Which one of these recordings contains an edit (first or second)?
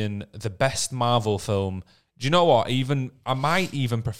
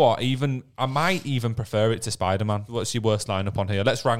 second